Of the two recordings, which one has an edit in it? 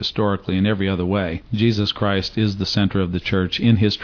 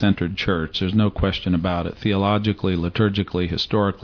first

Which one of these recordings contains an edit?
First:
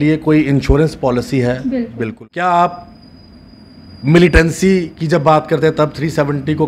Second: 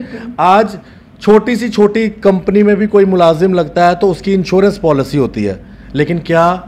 first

